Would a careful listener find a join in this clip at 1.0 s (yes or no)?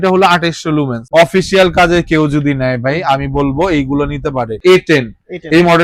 yes